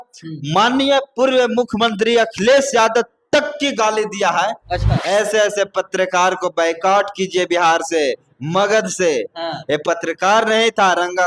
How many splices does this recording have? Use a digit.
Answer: 1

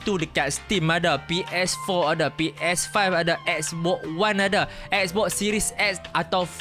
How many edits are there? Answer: 0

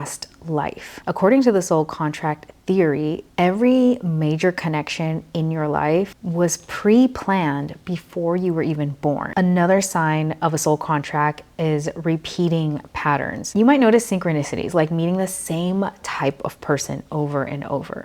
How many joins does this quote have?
3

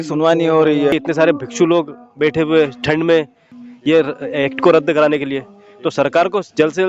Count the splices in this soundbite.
2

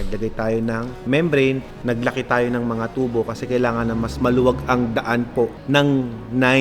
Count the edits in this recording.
3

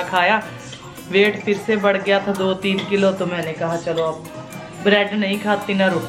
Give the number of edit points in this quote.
0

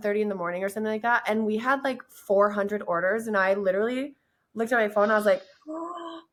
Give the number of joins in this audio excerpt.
0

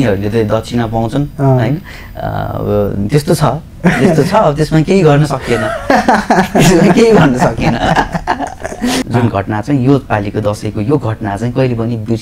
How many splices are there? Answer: 1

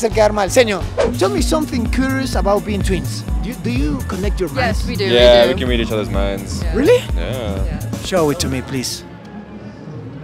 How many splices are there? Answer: 1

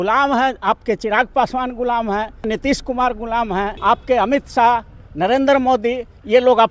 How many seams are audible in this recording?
2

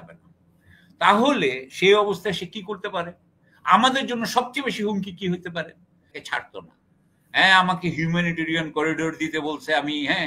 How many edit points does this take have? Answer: 1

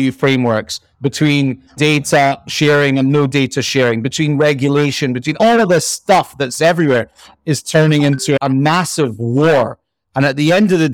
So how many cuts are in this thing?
1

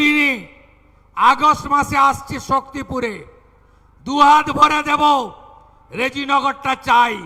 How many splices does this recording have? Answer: 0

